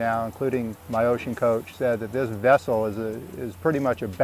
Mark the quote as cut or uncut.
uncut